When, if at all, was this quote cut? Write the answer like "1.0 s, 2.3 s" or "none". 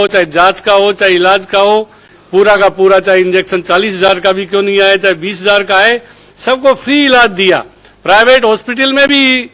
none